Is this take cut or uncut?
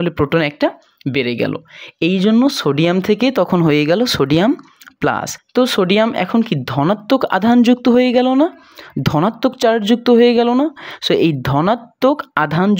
cut